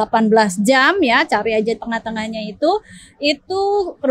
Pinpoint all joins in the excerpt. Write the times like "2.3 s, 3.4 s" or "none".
none